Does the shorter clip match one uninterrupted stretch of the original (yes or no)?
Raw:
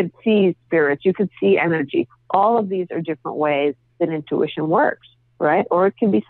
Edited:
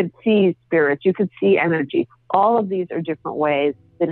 yes